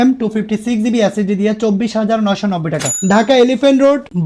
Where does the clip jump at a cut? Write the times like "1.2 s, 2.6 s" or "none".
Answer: 3.0 s